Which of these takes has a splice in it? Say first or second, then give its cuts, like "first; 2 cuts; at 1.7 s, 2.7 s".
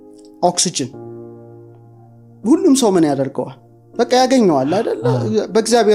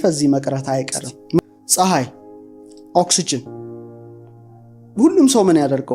second; 1 cut; at 1.4 s